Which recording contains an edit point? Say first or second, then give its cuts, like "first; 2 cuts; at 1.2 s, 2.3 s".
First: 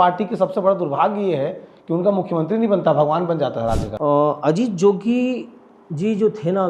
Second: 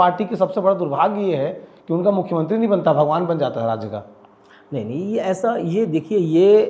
first; 1 cut; at 3.9 s